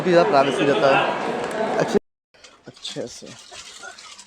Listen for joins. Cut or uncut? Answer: cut